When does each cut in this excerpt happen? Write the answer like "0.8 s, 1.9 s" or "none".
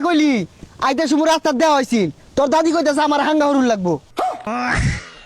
4.2 s